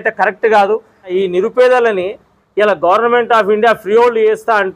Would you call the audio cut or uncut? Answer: cut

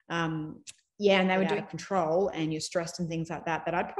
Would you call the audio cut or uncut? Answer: cut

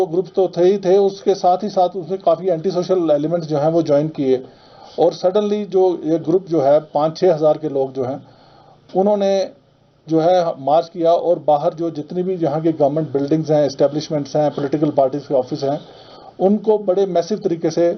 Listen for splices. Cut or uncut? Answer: uncut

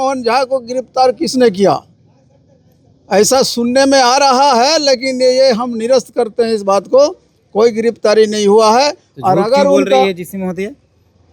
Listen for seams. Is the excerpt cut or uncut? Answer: uncut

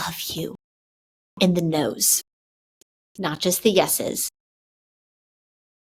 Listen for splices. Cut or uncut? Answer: uncut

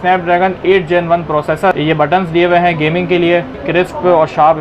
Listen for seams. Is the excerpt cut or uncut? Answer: cut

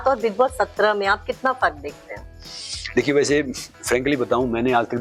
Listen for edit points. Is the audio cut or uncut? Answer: uncut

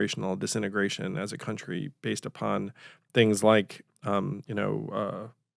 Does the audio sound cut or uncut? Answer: uncut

